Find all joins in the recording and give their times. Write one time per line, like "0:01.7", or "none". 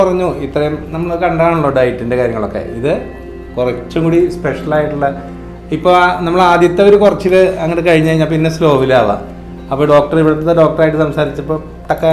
none